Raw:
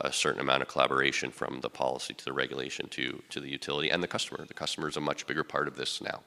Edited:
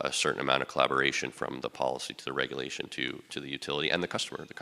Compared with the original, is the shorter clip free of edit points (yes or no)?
yes